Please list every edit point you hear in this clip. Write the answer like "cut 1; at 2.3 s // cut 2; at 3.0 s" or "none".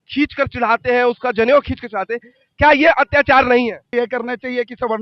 cut 1; at 3.9 s